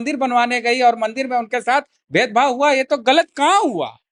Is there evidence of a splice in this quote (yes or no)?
no